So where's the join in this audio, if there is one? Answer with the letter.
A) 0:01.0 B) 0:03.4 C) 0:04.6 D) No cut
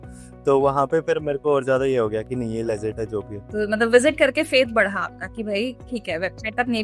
B